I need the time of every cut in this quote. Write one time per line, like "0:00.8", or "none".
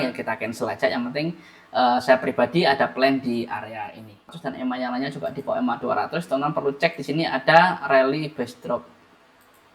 0:04.3